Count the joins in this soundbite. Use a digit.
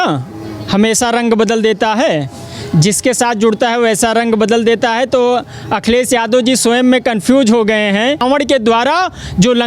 1